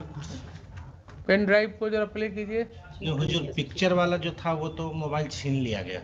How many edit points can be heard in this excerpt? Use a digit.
1